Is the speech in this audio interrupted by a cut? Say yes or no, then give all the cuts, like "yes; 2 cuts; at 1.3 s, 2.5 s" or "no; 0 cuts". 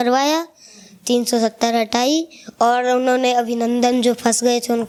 no; 0 cuts